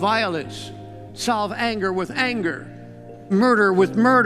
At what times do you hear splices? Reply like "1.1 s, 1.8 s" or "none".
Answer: 3.3 s